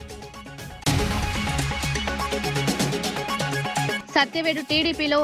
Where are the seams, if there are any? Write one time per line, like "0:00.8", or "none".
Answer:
0:00.8
0:02.2
0:03.5